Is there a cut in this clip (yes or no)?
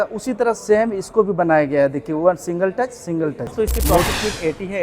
yes